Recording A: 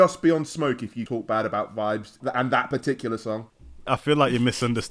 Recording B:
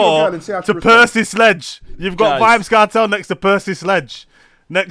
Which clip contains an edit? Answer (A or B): A